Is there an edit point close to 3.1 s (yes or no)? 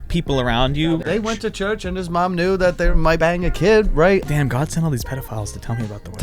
yes